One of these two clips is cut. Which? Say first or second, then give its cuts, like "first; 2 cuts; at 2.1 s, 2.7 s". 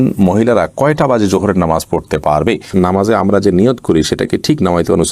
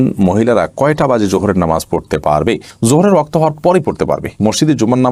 first; 1 cut; at 2.7 s